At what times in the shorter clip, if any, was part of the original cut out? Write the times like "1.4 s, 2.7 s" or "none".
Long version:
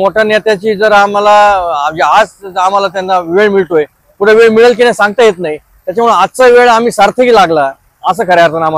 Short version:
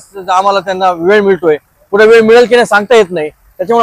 none